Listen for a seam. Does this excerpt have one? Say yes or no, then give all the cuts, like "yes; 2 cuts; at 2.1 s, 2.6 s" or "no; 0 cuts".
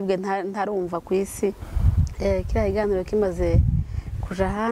yes; 1 cut; at 1.6 s